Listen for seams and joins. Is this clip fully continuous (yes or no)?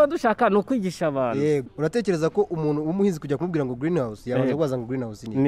no